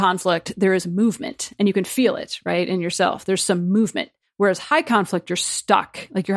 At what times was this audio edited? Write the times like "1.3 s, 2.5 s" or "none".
none